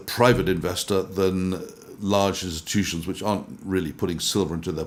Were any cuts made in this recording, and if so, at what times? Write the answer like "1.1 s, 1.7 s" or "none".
none